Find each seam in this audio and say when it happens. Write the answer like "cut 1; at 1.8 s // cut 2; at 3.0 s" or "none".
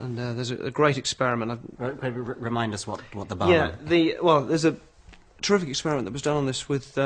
none